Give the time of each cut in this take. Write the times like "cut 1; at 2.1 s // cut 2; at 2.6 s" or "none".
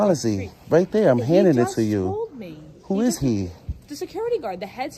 none